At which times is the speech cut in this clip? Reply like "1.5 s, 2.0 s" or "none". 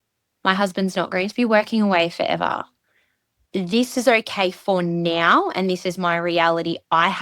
3.4 s